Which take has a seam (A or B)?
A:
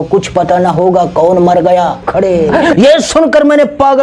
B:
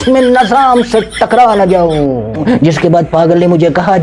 A